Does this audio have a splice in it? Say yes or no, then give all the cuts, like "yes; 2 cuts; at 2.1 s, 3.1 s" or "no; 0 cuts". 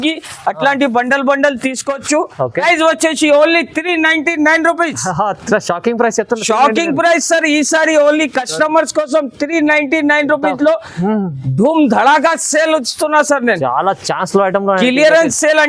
yes; 1 cut; at 2.6 s